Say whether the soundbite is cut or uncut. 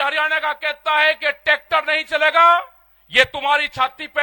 uncut